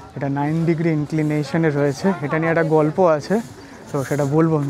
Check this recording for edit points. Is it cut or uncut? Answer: uncut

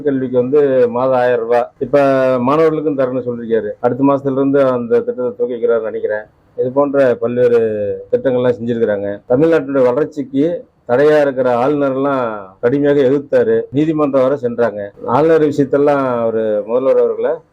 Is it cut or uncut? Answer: uncut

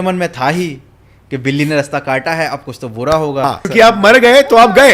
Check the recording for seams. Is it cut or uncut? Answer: cut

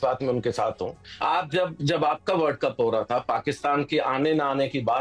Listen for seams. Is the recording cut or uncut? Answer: cut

